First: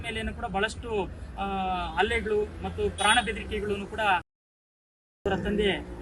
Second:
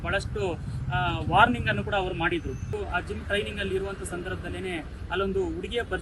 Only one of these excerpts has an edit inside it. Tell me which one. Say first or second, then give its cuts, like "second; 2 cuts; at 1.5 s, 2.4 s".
second; 1 cut; at 2.7 s